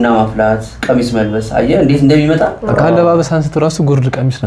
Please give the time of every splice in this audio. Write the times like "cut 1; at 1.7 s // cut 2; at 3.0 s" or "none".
none